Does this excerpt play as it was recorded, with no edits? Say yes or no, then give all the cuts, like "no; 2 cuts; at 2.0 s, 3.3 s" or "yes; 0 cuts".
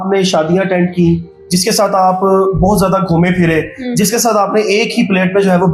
yes; 0 cuts